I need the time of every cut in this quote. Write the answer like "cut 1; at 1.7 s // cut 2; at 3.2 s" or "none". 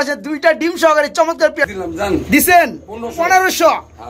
cut 1; at 1.6 s